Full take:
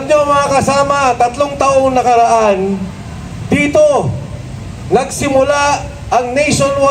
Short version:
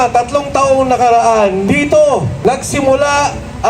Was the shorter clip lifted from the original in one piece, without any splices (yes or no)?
no